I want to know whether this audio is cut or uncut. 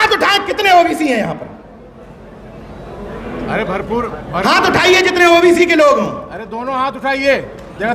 uncut